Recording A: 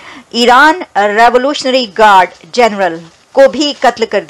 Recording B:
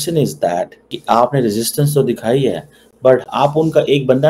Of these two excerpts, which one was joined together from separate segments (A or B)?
B